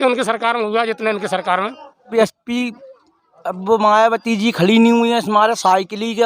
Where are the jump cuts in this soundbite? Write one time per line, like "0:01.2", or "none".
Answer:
0:02.1